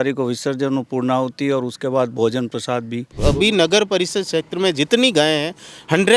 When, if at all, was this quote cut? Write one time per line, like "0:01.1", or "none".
0:03.1